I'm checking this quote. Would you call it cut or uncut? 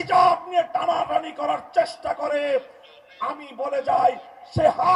uncut